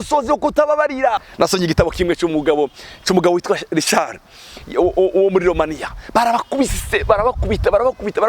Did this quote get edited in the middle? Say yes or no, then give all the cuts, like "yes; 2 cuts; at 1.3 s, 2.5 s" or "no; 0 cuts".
yes; 1 cut; at 1.3 s